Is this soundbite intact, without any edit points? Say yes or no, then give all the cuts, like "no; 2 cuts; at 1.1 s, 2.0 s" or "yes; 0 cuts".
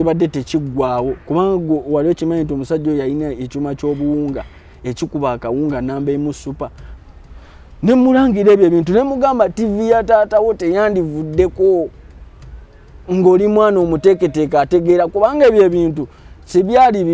no; 1 cut; at 6.9 s